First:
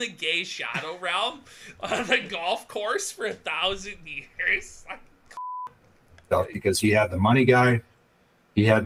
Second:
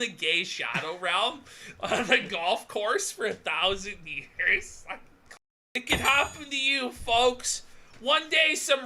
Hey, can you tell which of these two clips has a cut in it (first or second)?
second